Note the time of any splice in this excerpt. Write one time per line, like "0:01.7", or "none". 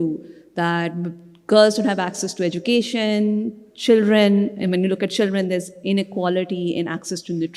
none